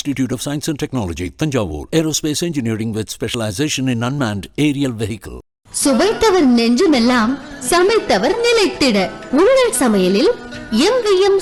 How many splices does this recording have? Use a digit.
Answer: 0